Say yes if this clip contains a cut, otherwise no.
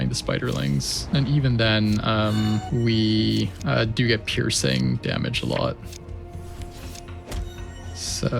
yes